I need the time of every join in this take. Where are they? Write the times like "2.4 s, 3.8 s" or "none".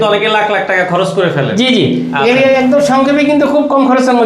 none